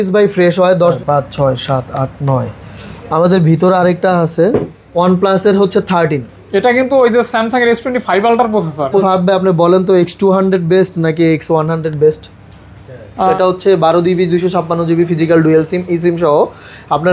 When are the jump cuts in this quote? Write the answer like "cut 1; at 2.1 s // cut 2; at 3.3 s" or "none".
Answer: cut 1; at 1.0 s // cut 2; at 4.8 s // cut 3; at 9.0 s // cut 4; at 13.3 s